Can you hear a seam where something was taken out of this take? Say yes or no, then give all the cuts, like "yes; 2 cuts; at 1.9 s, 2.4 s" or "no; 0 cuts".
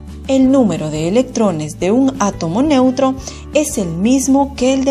yes; 1 cut; at 3.0 s